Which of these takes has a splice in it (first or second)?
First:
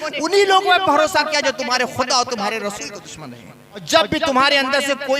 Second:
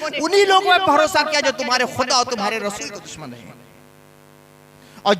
first